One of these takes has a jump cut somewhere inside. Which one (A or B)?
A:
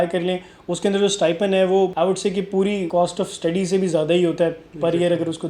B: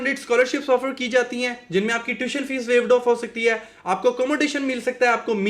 A